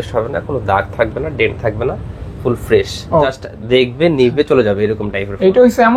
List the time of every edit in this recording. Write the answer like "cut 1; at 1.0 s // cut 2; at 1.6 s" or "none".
cut 1; at 3.3 s